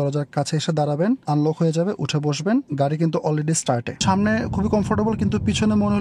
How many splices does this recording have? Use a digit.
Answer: 3